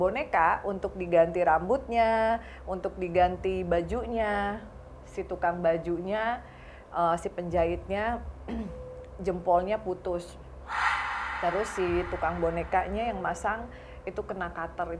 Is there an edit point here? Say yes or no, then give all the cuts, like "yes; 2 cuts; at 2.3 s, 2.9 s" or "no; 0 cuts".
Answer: no; 0 cuts